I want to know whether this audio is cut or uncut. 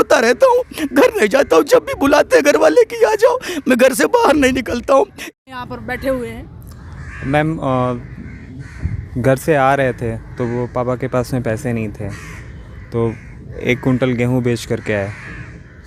cut